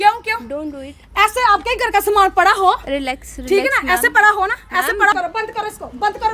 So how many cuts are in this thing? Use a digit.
1